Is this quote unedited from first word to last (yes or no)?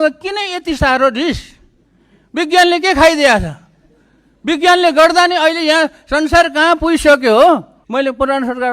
no